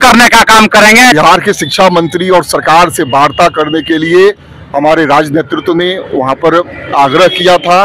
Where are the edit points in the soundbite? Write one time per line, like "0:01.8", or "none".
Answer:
0:01.1